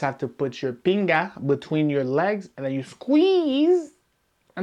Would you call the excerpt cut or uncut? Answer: uncut